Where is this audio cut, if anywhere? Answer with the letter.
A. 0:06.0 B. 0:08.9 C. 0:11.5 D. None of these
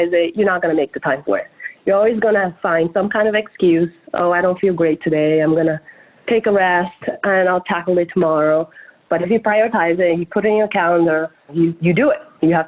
C